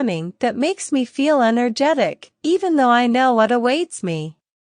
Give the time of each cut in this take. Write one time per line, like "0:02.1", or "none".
0:02.3